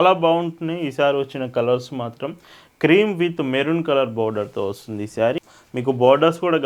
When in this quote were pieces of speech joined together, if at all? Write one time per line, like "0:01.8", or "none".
0:05.5